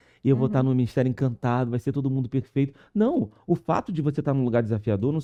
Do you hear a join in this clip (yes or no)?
no